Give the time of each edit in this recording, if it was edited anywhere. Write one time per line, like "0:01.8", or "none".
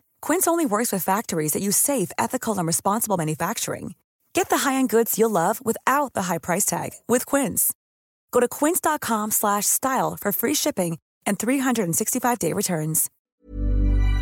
0:13.1